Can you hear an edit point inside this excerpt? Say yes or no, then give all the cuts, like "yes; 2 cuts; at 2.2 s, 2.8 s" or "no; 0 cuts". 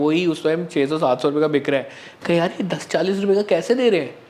no; 0 cuts